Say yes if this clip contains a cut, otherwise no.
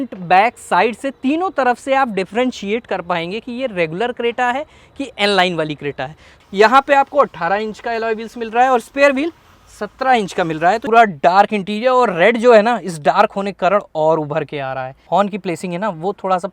yes